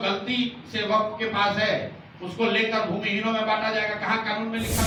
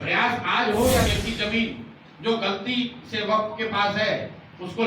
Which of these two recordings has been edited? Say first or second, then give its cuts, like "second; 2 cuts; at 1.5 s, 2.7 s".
second; 1 cut; at 1.1 s